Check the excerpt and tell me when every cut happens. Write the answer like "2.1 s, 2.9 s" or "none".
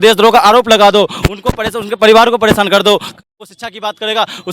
3.2 s